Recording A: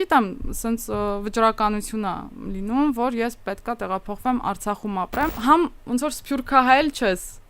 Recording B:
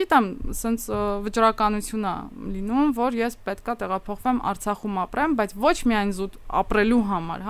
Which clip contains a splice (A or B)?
A